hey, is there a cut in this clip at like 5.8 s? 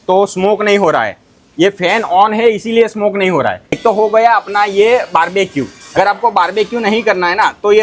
yes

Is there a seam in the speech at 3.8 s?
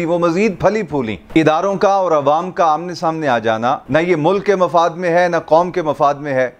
yes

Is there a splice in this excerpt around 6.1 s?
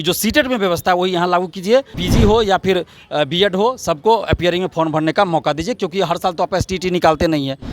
no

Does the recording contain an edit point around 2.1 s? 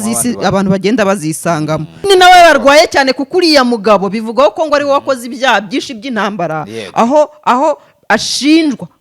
yes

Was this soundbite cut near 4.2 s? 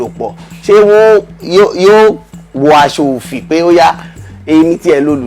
yes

